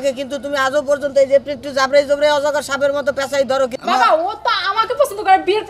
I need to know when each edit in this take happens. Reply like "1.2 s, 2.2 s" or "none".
3.8 s